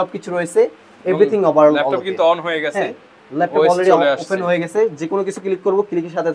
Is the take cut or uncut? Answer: uncut